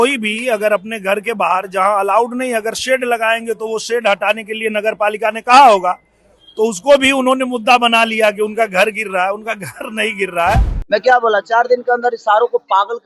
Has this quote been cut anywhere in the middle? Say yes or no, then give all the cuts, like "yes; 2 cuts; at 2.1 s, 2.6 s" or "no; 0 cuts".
yes; 1 cut; at 10.7 s